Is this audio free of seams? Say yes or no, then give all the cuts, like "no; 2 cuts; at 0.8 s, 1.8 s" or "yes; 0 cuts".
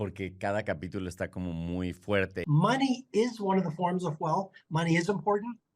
no; 1 cut; at 2.4 s